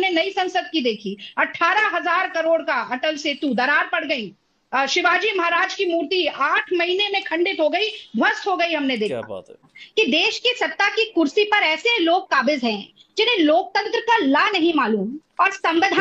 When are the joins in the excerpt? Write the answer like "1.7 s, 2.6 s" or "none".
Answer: 9.5 s